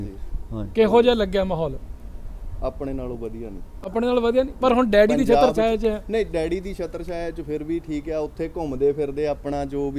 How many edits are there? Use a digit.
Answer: 0